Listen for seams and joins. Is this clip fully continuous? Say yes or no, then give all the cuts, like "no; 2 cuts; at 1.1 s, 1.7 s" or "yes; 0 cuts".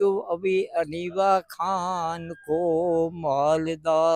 yes; 0 cuts